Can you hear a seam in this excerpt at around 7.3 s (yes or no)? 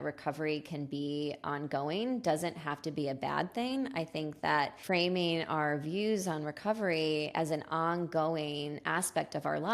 no